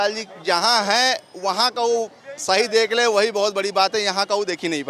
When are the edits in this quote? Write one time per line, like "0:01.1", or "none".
none